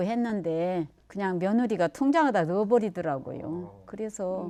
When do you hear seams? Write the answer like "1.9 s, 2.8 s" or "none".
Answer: none